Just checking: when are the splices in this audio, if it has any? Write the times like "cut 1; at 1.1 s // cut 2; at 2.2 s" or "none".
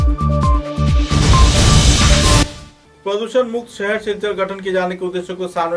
cut 1; at 2.5 s